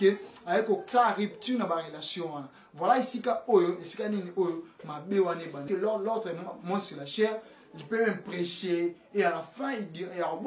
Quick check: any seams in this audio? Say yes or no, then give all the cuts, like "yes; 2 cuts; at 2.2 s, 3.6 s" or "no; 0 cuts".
yes; 1 cut; at 5.7 s